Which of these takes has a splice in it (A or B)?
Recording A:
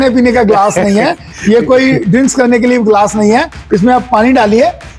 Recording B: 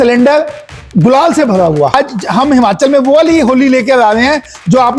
B